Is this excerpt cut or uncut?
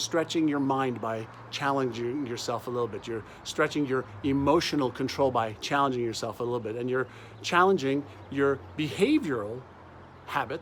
uncut